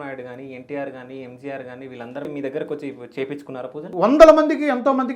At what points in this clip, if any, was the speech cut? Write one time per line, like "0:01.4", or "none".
0:02.3
0:03.9